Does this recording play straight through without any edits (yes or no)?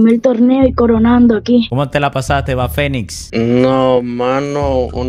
yes